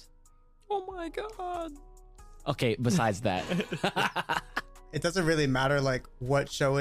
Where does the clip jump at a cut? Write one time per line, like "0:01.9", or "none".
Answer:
0:05.0